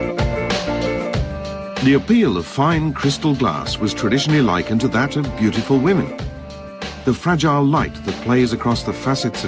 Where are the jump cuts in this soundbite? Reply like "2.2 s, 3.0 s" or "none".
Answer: none

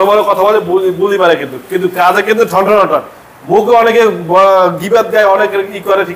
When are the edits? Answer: none

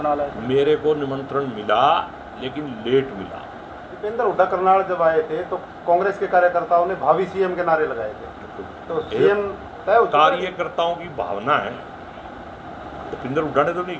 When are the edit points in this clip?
4.1 s

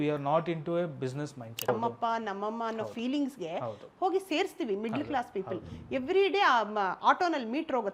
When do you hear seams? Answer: 1.7 s

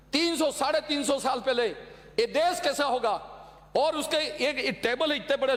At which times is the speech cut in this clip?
none

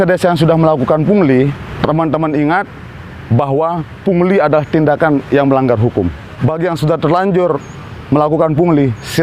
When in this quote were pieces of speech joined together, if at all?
1.6 s, 6.3 s

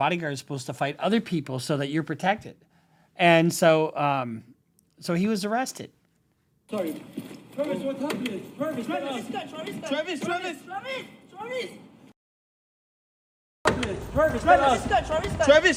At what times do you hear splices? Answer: none

